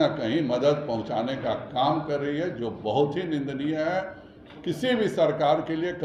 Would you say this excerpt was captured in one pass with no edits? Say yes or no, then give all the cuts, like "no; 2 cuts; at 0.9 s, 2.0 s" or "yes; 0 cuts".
yes; 0 cuts